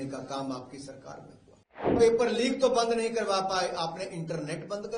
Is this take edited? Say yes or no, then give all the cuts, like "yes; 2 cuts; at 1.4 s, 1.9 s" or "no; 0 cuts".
yes; 1 cut; at 2.0 s